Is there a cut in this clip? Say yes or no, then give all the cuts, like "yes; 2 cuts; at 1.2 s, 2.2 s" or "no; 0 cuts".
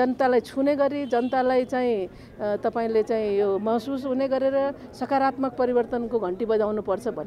no; 0 cuts